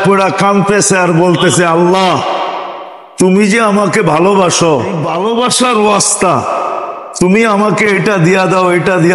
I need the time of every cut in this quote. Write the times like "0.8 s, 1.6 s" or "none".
5.1 s